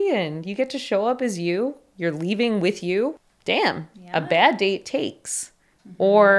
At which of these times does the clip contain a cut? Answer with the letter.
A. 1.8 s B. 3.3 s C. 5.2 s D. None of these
B